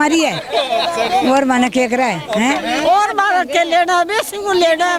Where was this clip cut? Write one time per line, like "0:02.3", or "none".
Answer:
none